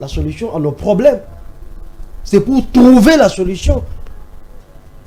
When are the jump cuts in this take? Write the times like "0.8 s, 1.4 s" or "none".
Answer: none